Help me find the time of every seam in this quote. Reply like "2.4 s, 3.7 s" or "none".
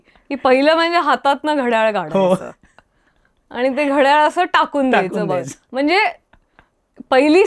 none

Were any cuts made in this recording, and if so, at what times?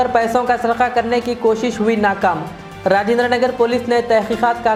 none

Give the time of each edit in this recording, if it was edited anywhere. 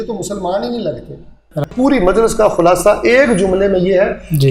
1.7 s

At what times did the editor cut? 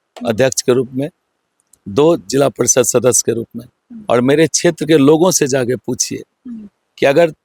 none

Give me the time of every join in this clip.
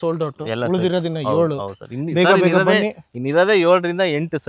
none

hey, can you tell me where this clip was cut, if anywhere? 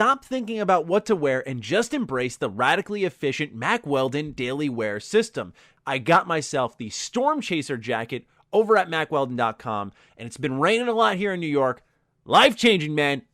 5.7 s

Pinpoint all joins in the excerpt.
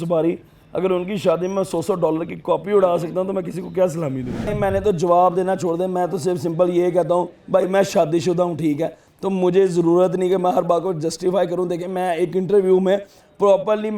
4.5 s

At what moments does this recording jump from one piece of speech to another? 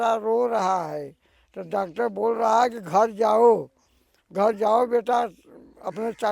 none

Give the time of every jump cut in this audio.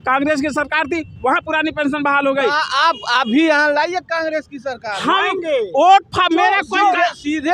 none

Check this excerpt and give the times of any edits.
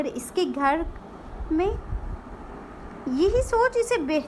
none

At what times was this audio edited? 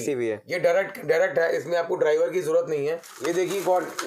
3.1 s

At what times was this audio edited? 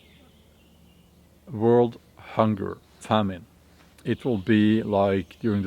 2.9 s, 3.9 s

